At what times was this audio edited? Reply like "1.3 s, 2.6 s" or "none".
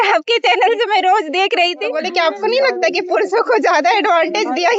1.9 s

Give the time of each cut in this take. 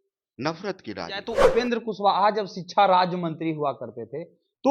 1.5 s

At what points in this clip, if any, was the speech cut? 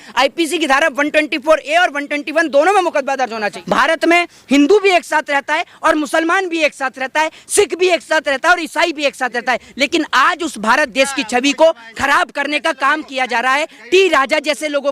3.6 s

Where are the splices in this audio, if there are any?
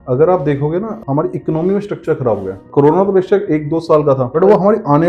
0.9 s, 2.7 s, 4.3 s

